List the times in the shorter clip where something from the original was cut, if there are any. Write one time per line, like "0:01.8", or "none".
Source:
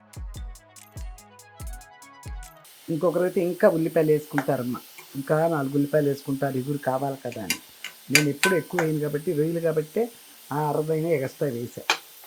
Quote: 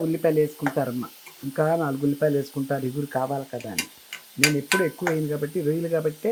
none